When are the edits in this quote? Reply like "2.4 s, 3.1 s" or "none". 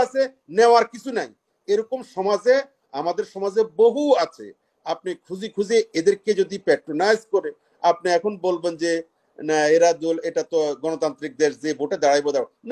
none